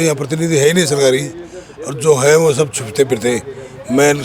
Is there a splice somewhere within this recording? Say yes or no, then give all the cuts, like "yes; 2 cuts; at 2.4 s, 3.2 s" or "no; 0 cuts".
no; 0 cuts